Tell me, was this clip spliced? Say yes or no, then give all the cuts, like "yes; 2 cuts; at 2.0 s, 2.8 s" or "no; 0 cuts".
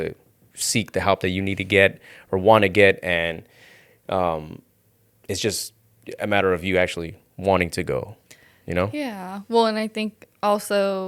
no; 0 cuts